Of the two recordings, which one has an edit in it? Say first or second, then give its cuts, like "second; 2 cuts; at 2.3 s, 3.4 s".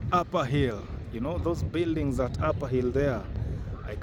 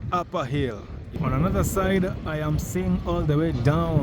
second; 1 cut; at 1.0 s